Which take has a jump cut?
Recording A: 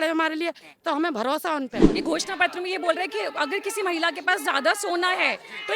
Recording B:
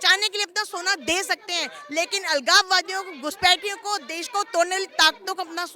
A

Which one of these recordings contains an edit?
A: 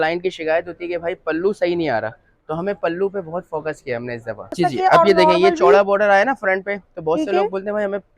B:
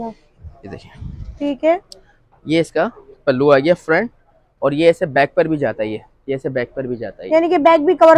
A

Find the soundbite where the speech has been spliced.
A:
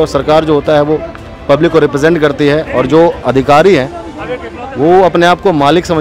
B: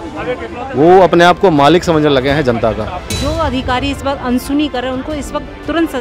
B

